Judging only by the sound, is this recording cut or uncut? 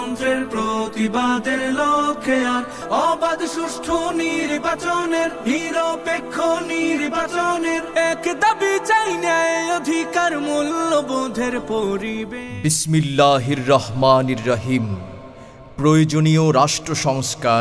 cut